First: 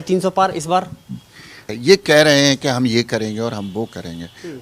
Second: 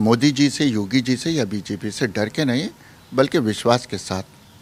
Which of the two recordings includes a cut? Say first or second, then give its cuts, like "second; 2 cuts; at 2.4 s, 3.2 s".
first; 1 cut; at 1.7 s